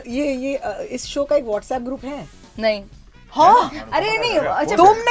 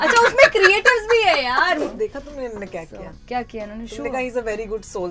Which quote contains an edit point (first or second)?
second